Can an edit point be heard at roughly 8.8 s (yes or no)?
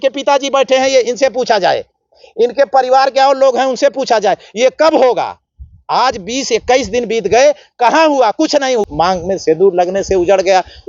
yes